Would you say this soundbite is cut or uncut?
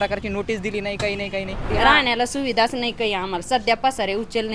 cut